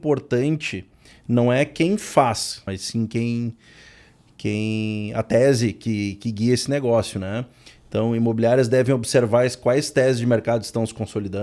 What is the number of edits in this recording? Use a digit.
1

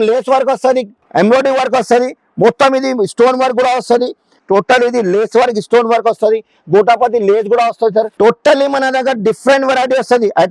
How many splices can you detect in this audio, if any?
3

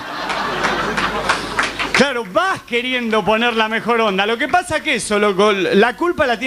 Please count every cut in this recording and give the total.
1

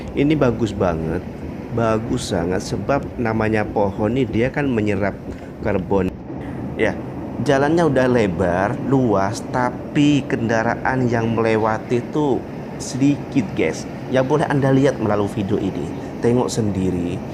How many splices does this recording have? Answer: 1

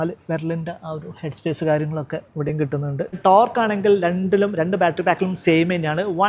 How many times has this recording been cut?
1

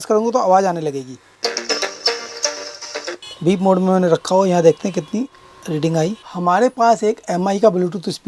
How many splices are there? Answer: 3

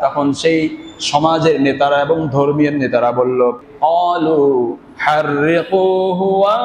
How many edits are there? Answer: 1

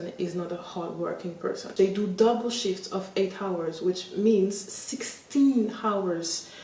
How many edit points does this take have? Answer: 1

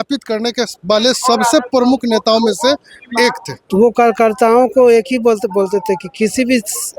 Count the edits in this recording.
1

